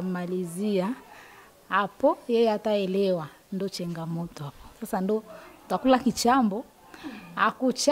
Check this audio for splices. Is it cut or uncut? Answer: uncut